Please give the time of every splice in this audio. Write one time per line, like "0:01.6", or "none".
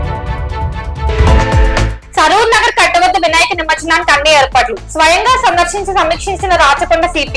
0:01.1